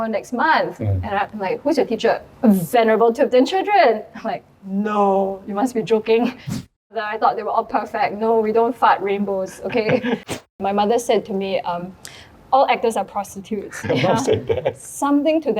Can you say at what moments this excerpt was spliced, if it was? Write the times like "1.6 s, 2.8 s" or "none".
2.3 s, 6.7 s, 10.3 s, 13.8 s

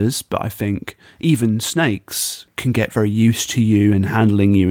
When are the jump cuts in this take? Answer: 2.5 s

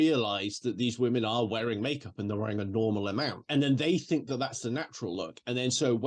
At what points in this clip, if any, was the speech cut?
3.4 s

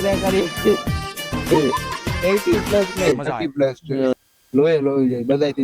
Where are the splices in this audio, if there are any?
4.1 s

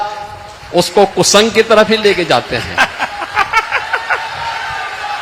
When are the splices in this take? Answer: none

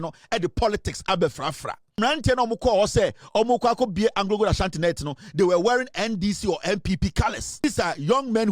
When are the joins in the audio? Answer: 2.0 s, 7.6 s

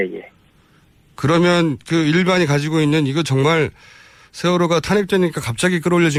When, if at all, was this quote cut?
none

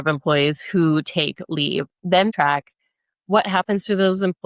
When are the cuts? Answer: 2.3 s

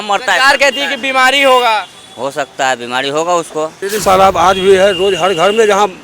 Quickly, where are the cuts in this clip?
3.8 s

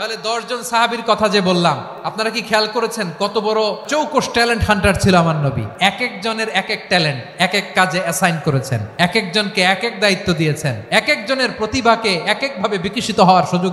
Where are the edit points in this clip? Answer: 2.0 s, 3.9 s, 5.7 s, 8.8 s, 10.8 s

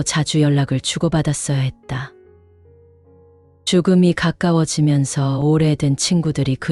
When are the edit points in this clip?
2.1 s, 3.6 s

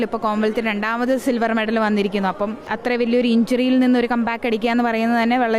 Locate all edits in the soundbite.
2.7 s

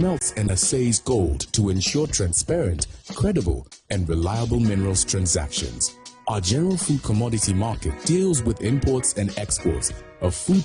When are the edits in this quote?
none

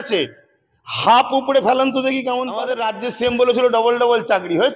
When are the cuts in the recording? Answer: 2.8 s

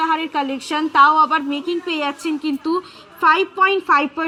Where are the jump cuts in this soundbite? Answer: none

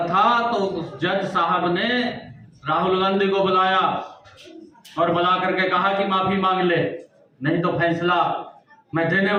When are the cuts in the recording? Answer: none

